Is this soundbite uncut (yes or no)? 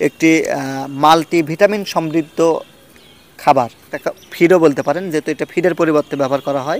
no